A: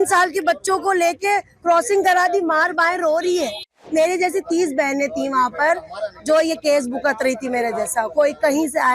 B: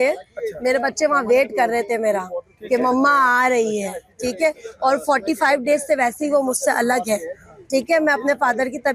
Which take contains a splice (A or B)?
A